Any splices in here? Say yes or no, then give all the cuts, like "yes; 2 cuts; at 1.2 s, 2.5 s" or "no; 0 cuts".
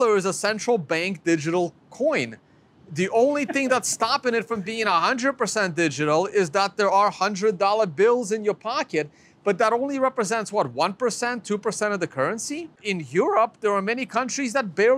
yes; 1 cut; at 12.8 s